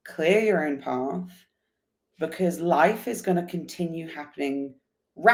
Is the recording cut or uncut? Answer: uncut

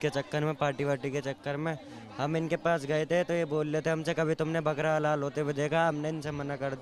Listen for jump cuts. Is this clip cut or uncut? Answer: uncut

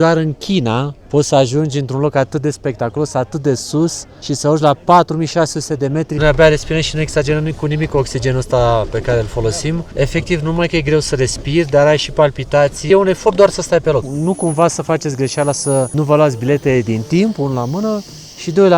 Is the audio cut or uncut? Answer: cut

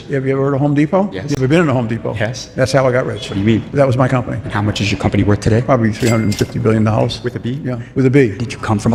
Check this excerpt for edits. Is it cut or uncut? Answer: uncut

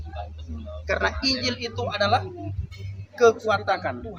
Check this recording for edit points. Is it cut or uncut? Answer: uncut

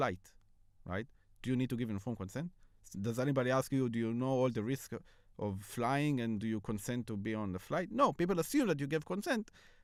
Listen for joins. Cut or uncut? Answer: uncut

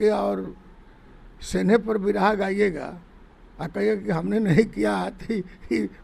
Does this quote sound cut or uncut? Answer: uncut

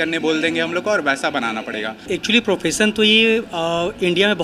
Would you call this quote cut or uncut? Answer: cut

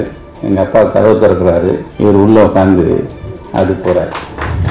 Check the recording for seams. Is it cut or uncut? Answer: cut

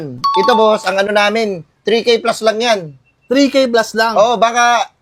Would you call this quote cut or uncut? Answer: uncut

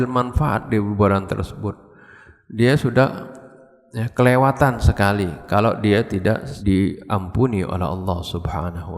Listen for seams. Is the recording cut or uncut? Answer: cut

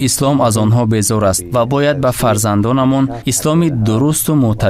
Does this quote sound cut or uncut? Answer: uncut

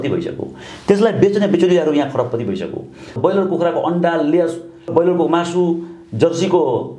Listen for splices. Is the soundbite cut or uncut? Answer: cut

